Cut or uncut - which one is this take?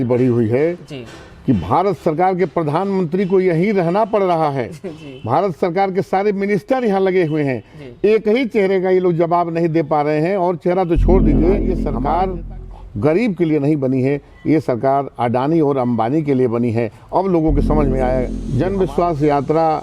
cut